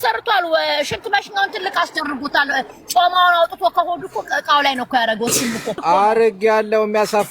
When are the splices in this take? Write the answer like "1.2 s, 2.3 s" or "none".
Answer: 5.8 s